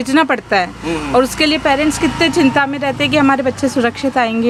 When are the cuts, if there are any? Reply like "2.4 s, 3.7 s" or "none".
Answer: none